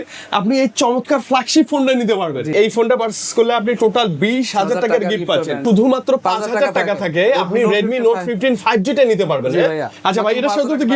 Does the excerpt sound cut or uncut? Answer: cut